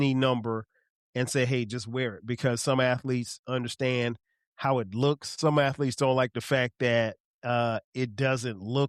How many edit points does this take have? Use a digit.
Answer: 0